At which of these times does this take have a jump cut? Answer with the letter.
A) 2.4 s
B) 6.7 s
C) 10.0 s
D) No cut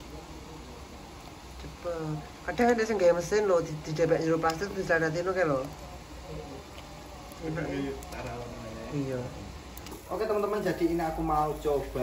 C